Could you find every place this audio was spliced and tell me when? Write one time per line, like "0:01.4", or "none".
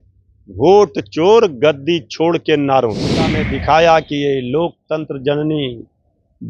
0:03.5